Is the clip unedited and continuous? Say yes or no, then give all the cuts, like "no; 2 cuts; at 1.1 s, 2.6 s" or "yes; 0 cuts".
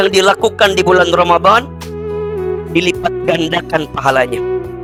yes; 0 cuts